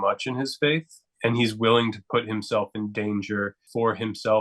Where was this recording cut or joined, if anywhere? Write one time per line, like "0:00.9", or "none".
0:01.1